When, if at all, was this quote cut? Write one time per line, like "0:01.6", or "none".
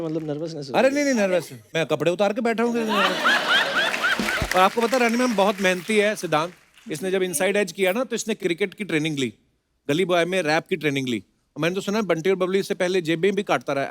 0:04.3